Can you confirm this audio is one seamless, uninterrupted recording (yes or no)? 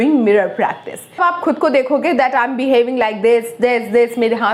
no